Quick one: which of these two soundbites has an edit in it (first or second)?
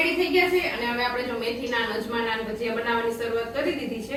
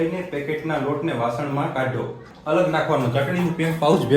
second